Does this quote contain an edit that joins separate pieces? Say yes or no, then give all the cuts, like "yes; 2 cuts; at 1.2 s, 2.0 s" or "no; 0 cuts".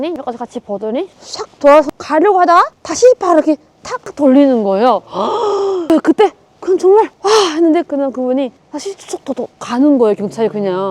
no; 0 cuts